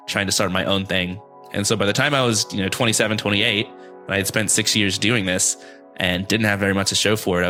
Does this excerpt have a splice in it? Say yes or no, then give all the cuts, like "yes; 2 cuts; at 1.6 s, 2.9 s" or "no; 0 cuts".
no; 0 cuts